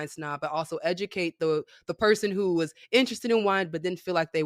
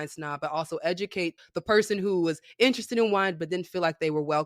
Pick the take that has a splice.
second; 1 cut; at 1.3 s

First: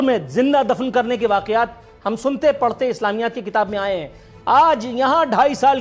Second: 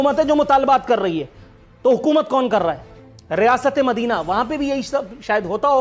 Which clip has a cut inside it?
second; 1 cut; at 2.8 s

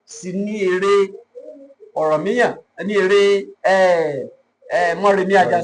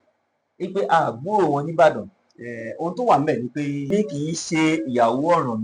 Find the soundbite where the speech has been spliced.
second; 1 cut; at 3.9 s

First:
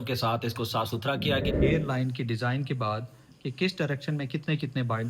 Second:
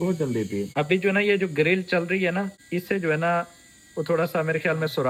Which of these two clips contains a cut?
first; 1 cut; at 1.5 s

